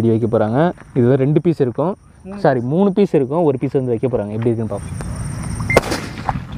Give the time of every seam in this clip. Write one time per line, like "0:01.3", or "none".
0:04.8